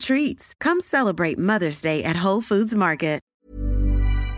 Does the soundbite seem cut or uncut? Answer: uncut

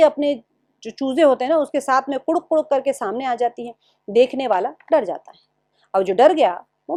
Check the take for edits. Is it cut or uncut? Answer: uncut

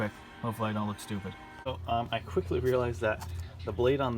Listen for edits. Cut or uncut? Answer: cut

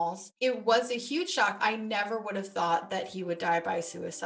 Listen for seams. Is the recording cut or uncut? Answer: cut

